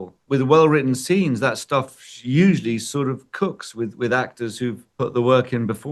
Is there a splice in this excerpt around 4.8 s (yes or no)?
yes